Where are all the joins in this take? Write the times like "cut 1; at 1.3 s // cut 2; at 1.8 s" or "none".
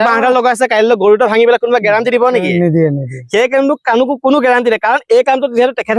none